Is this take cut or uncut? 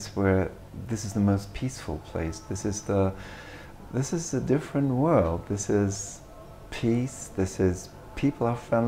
uncut